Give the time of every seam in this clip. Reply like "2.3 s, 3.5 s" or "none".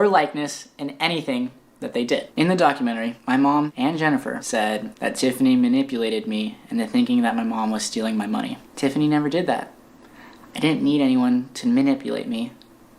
2.3 s

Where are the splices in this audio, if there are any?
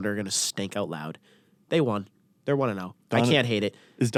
none

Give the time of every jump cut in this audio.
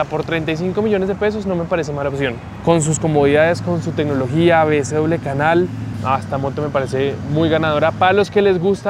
none

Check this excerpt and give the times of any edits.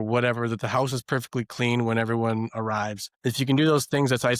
none

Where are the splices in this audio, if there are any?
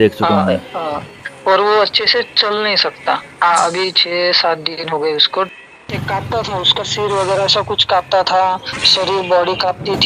5.5 s

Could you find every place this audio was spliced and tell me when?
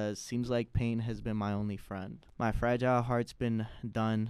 2.2 s

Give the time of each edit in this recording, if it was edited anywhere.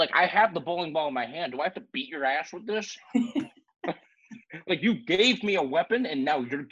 none

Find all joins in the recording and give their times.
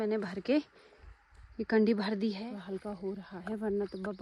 2.4 s

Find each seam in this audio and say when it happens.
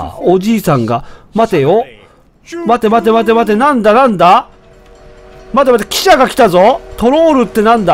none

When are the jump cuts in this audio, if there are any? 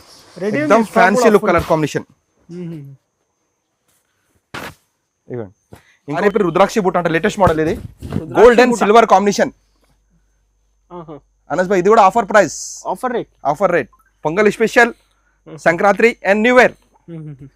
6.2 s

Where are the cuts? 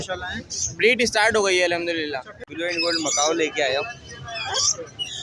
2.5 s

